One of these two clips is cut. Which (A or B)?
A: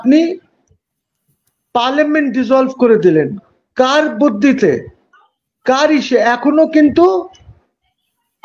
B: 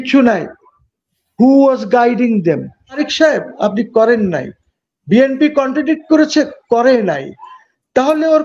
B